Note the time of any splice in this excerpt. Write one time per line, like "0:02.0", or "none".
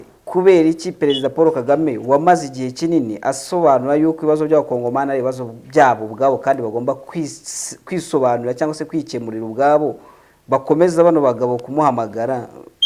none

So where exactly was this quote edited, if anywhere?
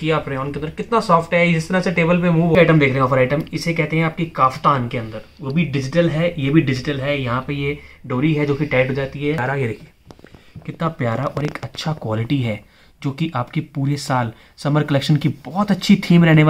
0:02.5
0:09.4

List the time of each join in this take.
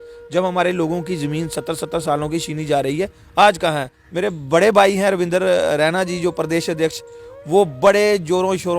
0:04.0

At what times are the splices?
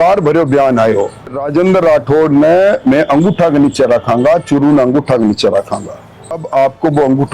0:01.4
0:06.4

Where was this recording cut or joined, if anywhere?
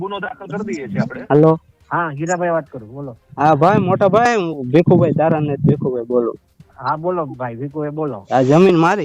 0:01.2
0:08.2

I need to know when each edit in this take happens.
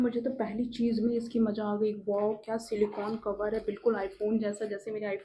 none

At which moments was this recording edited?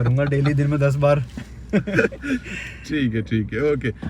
none

